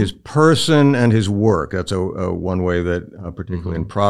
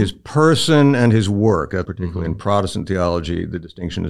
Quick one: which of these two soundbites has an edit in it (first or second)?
second